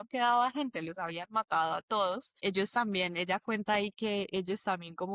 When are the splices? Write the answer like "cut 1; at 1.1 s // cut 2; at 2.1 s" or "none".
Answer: cut 1; at 2.3 s